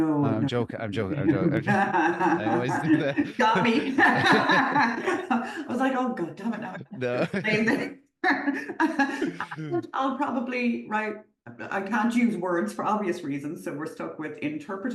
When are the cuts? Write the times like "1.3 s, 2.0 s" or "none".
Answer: none

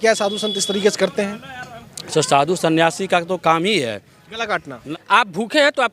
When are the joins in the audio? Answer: 4.8 s

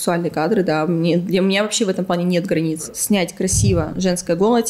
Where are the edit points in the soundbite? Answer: 2.9 s

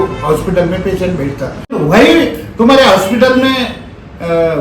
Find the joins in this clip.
1.8 s

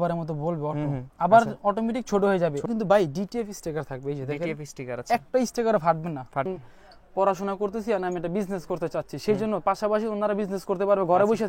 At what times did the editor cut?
2.7 s, 6.5 s

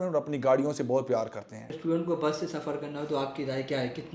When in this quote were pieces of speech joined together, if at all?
1.6 s

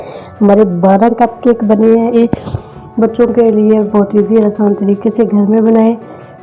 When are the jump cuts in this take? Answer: 2.2 s

